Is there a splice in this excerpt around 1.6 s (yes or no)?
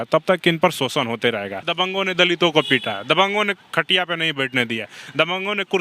yes